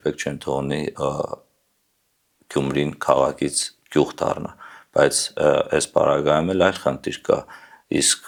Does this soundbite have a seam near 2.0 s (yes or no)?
no